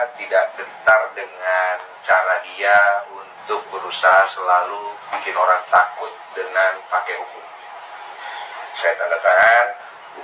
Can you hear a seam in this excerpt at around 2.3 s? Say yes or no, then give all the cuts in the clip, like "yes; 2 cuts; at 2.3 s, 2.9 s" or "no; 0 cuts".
no; 0 cuts